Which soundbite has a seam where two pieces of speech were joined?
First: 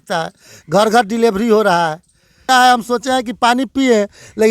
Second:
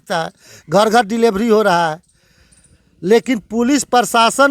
first; 1 cut; at 2.5 s

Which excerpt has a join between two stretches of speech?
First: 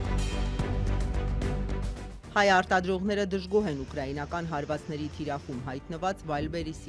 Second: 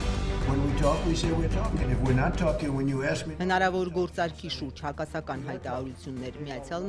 first; 1 cut; at 1.6 s

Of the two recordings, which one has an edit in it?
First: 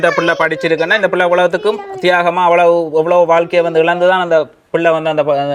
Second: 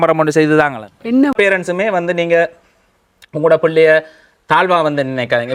second; 1 cut; at 1.3 s

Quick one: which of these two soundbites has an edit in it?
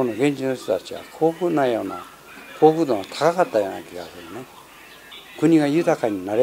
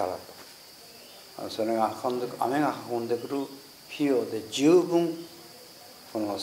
first; 1 cut; at 5.2 s

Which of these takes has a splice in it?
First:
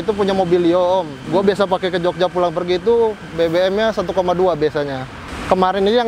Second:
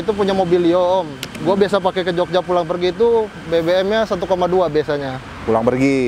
first; 2 cuts; at 1.2 s, 5.2 s

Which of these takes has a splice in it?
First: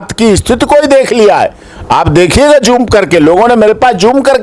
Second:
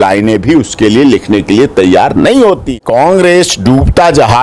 second; 1 cut; at 2.7 s

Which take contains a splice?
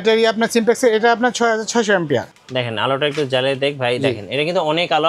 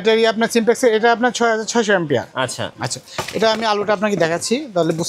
first; 1 cut; at 2.3 s

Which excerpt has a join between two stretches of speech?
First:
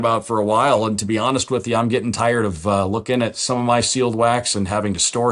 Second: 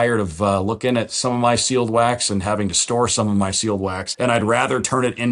second; 1 cut; at 4.0 s

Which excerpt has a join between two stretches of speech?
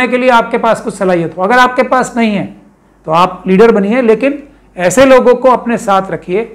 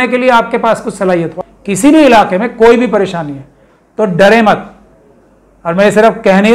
second; 1 cut; at 1.3 s

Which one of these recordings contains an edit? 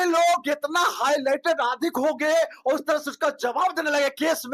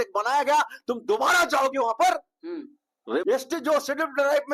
second; 1 cut; at 3.2 s

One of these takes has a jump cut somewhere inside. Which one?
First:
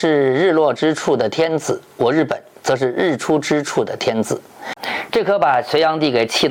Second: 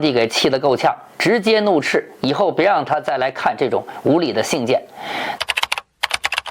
second; 1 cut; at 5.4 s

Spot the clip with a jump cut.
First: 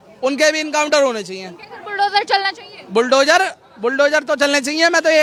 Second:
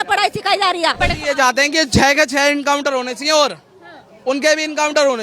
second; 1 cut; at 1.0 s

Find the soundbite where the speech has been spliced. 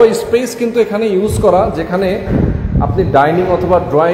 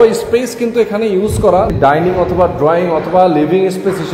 second; 1 cut; at 1.8 s

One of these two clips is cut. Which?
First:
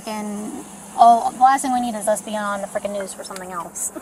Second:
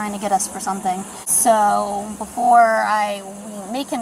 second; 1 cut; at 1.2 s

